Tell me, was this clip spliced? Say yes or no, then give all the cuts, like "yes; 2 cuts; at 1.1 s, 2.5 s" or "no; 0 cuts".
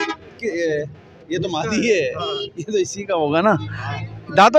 no; 0 cuts